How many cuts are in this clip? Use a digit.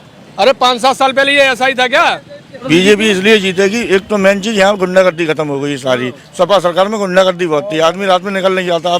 1